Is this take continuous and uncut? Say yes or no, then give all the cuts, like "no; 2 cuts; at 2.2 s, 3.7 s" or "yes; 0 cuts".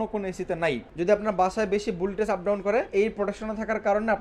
no; 2 cuts; at 0.9 s, 2.9 s